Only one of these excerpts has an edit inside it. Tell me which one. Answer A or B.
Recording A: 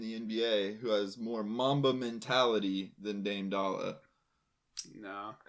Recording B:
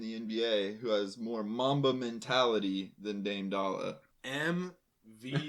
B